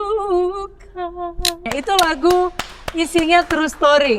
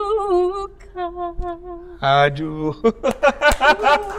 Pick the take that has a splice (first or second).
first